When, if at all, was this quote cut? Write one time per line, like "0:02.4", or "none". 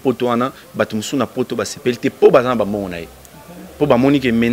none